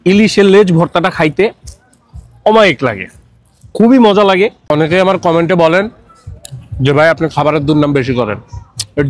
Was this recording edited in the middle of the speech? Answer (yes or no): yes